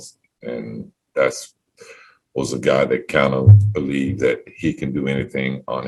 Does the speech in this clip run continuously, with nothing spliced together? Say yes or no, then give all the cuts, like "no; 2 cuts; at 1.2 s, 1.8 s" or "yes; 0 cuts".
yes; 0 cuts